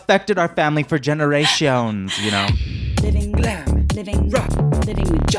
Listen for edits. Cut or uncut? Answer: cut